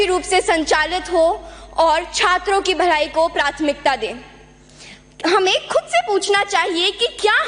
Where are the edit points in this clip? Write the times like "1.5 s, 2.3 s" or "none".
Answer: none